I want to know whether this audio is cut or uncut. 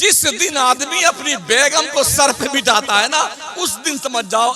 uncut